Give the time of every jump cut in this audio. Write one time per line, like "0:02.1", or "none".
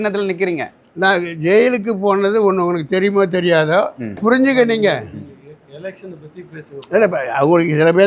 0:04.2